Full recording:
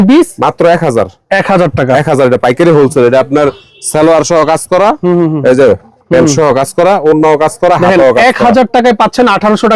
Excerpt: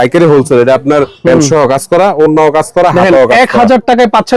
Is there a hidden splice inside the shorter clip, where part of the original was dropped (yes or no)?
yes